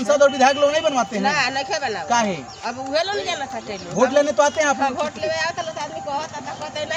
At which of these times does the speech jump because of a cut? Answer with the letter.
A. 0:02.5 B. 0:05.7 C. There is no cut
C